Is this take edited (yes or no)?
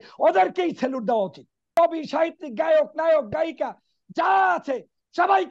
yes